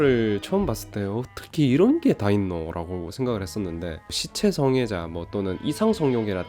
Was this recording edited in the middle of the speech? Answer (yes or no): no